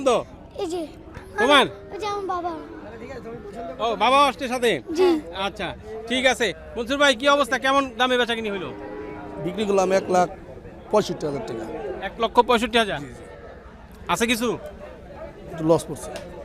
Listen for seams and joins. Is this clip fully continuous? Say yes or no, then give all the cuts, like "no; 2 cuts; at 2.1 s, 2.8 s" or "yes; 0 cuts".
yes; 0 cuts